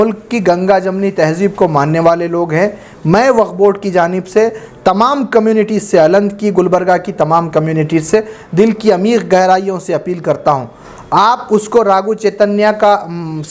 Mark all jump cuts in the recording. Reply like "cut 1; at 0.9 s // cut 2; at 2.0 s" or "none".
none